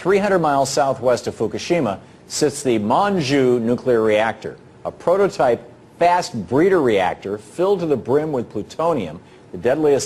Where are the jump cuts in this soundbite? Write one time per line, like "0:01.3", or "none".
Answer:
0:05.3